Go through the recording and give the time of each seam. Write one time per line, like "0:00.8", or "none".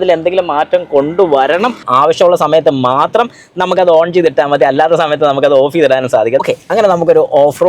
0:01.8
0:06.4